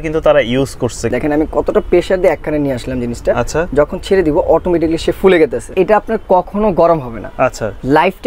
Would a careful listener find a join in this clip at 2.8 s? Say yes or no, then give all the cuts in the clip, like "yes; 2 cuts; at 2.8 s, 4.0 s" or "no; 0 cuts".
no; 2 cuts; at 1.0 s, 5.7 s